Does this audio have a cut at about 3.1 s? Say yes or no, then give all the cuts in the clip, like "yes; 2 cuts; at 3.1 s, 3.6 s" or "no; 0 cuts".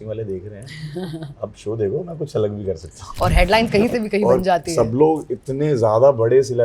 yes; 1 cut; at 3.1 s